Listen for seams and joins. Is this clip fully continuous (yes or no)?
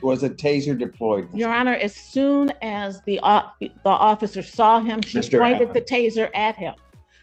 yes